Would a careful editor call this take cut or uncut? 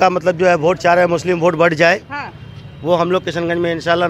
uncut